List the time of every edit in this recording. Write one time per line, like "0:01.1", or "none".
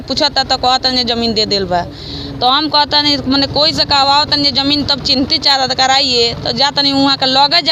none